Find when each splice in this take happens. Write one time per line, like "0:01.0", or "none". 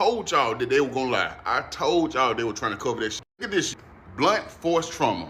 0:03.5

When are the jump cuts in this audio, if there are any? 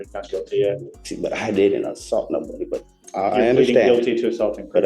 0:01.0

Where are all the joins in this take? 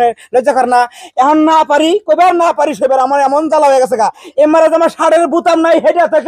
0:04.2

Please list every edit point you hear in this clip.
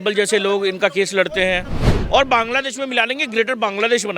0:01.9

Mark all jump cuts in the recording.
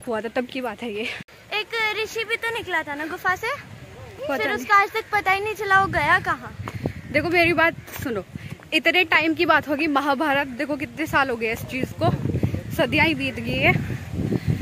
none

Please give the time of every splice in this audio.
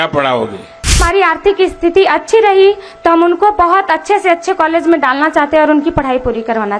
0:01.0

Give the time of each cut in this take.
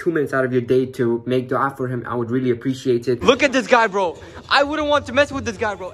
0:03.2

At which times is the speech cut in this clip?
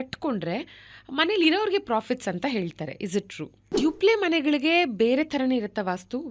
0:03.7

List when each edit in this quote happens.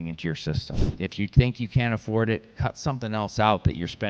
none

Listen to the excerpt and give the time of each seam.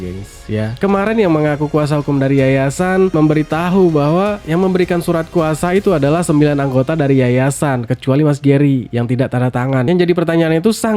0:09.8

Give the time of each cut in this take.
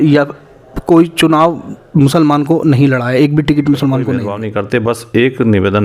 0:04.4

